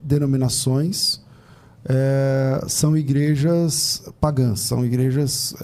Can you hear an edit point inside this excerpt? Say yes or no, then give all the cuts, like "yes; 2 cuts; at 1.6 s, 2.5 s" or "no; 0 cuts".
no; 0 cuts